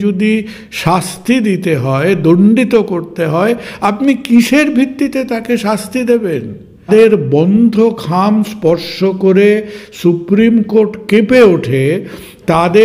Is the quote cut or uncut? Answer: cut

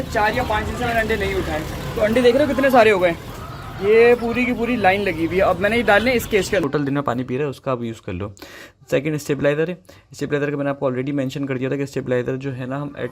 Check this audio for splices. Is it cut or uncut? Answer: cut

